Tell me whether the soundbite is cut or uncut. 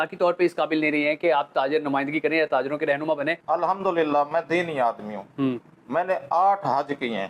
cut